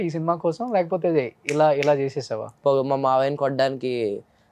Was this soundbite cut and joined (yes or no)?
yes